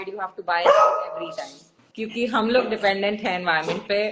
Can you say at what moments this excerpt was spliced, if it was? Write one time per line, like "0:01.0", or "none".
0:01.6

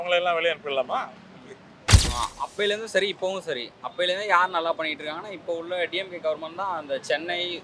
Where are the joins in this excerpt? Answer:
0:01.8

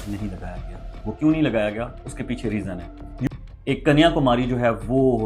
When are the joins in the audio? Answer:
0:03.3

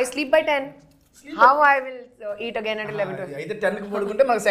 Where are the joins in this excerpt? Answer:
none

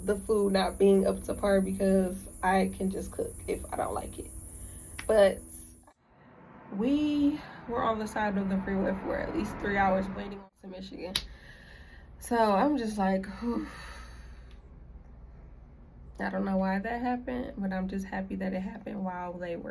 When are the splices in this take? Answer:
0:05.7
0:10.3

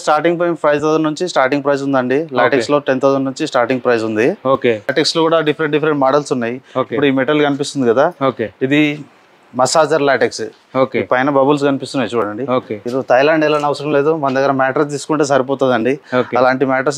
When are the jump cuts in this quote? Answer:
0:04.9
0:12.8

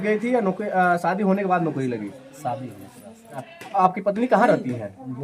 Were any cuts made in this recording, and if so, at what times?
0:03.6

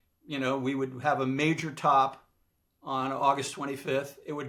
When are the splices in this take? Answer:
none

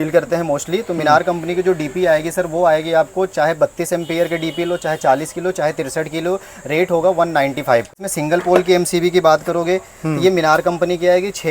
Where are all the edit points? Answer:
0:08.0

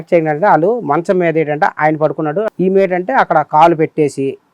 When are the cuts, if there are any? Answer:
0:02.5

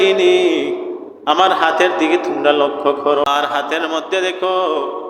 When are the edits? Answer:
0:03.2

